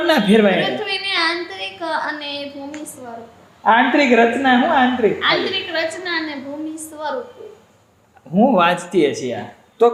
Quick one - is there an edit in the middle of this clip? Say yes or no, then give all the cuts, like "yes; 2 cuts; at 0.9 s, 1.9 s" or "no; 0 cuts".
no; 0 cuts